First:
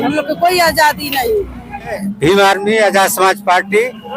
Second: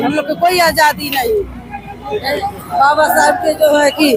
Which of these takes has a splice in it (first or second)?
first